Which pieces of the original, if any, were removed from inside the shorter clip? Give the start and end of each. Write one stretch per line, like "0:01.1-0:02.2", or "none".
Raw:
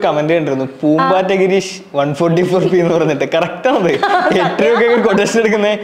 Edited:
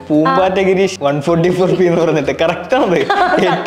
0:01.7-0:01.9